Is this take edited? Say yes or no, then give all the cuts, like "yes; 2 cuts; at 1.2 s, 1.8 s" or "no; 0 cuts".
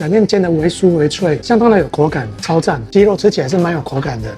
yes; 1 cut; at 2.8 s